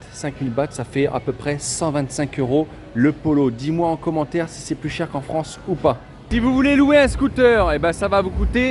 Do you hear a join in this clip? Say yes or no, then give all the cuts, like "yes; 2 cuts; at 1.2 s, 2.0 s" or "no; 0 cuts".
no; 0 cuts